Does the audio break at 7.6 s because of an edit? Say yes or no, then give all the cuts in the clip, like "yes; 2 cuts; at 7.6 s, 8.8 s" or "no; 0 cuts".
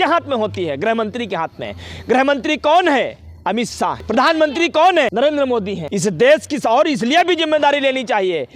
no; 2 cuts; at 4.0 s, 5.4 s